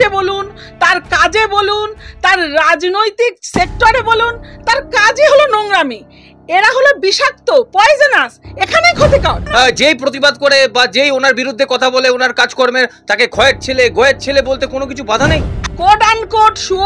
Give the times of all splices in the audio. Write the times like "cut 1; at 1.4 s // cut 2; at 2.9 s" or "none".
cut 1; at 9.4 s // cut 2; at 15.7 s